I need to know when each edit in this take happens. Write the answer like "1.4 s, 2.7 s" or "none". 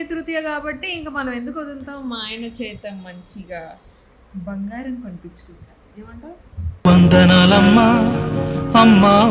none